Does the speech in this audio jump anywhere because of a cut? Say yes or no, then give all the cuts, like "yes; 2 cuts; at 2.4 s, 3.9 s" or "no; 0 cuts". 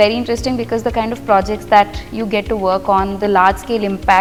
no; 0 cuts